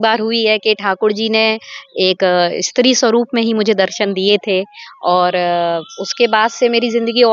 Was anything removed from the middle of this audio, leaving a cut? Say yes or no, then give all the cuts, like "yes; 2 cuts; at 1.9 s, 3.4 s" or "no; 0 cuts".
no; 0 cuts